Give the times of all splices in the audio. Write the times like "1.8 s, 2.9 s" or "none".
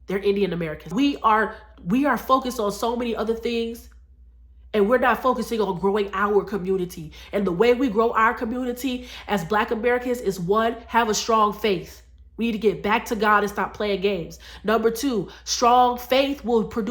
0.9 s